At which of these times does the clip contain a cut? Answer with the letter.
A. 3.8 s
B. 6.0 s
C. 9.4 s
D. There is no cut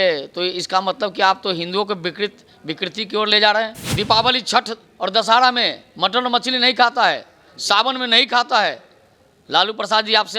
A